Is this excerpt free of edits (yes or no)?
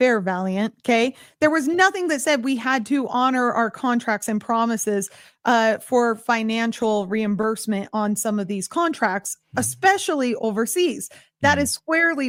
yes